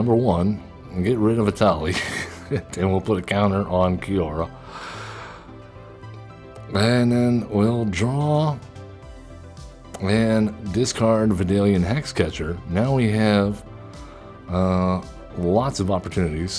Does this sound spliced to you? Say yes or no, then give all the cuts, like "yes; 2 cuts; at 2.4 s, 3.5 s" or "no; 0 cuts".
no; 0 cuts